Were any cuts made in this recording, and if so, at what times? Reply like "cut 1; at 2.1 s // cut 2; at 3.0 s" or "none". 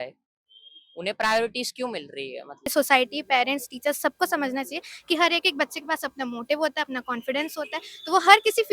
cut 1; at 2.7 s